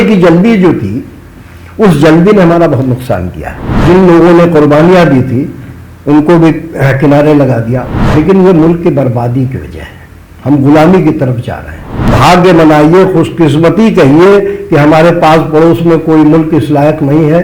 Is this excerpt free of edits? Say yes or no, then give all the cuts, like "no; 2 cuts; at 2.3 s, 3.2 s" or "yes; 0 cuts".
no; 3 cuts; at 3.8 s, 7.9 s, 12.1 s